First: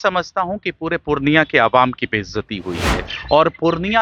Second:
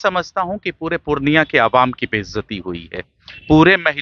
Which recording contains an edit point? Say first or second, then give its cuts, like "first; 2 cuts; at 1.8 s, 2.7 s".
first; 1 cut; at 3.1 s